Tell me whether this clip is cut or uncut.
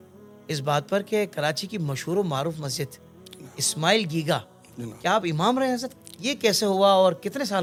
uncut